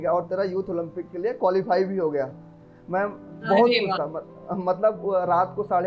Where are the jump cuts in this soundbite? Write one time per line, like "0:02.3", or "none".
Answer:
none